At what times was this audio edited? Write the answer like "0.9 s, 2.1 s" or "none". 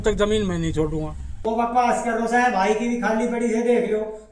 1.4 s

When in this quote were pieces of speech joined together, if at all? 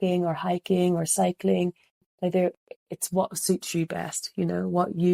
1.9 s

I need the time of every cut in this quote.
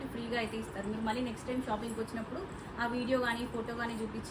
none

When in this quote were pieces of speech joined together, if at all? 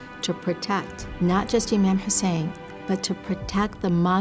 1.0 s

